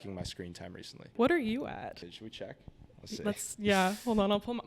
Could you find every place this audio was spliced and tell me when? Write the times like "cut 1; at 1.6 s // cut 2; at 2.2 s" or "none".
cut 1; at 1.1 s // cut 2; at 2.0 s

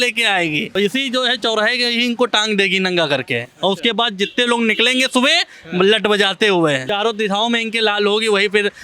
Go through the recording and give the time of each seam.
cut 1; at 0.8 s // cut 2; at 6.9 s

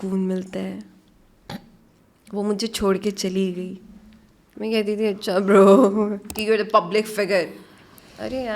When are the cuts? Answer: cut 1; at 6.3 s

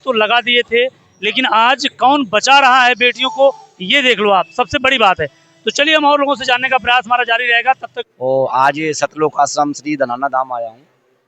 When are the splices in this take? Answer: cut 1; at 7.9 s

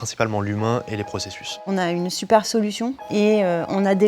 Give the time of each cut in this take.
cut 1; at 1.6 s // cut 2; at 3.0 s

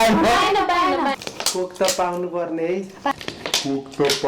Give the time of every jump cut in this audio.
cut 1; at 1.2 s

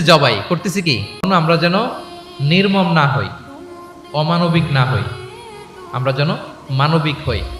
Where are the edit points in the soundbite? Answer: cut 1; at 1.3 s

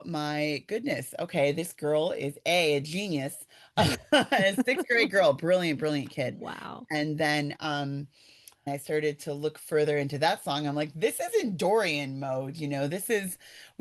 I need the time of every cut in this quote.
cut 1; at 8.7 s

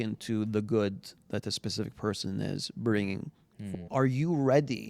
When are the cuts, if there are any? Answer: cut 1; at 3.6 s

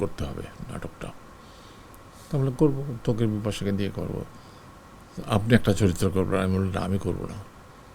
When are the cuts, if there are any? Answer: none

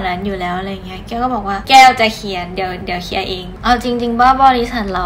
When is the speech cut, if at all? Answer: cut 1; at 1.6 s // cut 2; at 3.5 s

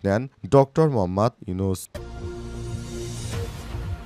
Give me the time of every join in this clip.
cut 1; at 1.9 s

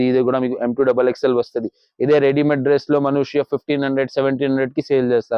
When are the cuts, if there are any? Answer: none

